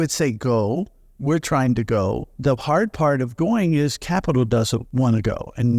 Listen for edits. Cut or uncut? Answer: cut